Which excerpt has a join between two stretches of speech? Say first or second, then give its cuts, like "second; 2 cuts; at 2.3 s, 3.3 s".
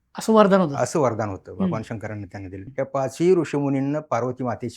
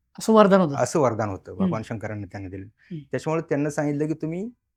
first; 1 cut; at 2.7 s